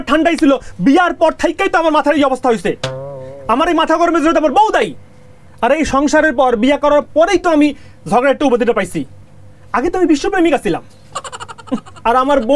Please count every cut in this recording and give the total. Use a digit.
0